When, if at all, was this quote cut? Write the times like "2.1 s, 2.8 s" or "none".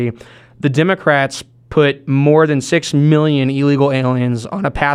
none